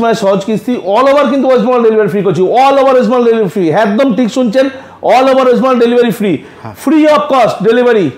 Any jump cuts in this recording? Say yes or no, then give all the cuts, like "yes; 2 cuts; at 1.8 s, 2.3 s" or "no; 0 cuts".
no; 0 cuts